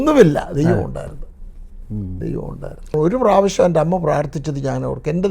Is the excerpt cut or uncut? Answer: cut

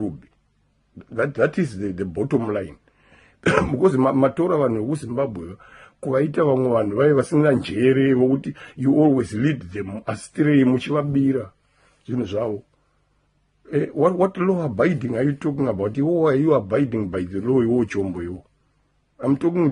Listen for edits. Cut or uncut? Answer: cut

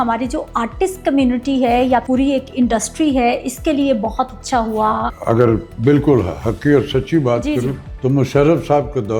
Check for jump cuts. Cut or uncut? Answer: cut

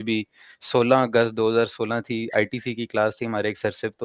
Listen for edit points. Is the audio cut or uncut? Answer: uncut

